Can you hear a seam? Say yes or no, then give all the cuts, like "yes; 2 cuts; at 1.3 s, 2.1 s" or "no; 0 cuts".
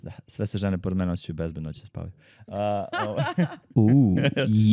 no; 0 cuts